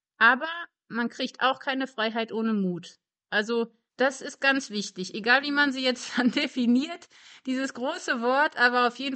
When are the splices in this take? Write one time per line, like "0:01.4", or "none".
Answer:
0:03.8